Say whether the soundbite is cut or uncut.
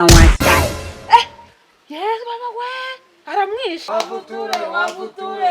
cut